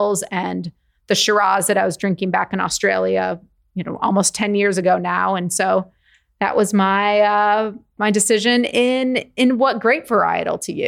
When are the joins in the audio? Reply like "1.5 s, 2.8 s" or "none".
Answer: 7.9 s